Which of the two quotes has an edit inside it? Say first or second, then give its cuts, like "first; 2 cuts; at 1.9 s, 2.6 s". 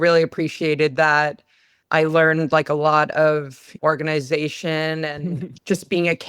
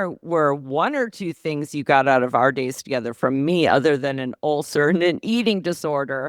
first; 1 cut; at 3.7 s